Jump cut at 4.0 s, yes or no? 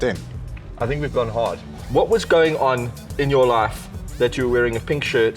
no